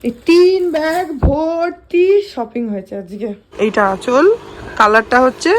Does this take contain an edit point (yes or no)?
yes